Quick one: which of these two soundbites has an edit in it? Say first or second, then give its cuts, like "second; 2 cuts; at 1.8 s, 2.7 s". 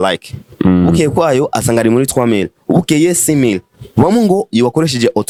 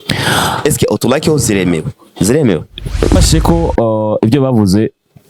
second; 1 cut; at 3.2 s